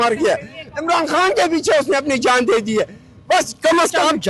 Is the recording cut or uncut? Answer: uncut